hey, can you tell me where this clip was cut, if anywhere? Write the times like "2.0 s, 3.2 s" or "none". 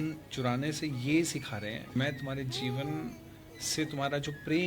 1.9 s